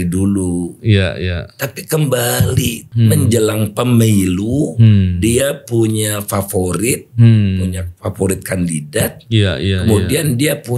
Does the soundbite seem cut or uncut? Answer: cut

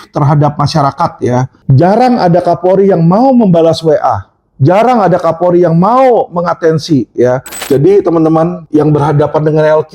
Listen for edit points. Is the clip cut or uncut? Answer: cut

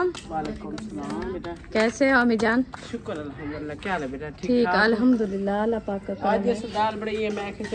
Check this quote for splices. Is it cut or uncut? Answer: uncut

